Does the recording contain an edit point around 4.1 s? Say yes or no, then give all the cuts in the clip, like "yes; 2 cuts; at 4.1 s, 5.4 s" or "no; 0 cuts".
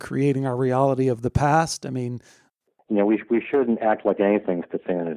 no; 1 cut; at 2.4 s